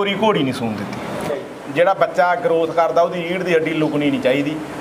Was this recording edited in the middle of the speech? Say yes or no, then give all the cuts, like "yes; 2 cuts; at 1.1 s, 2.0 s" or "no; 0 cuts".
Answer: yes; 1 cut; at 1.3 s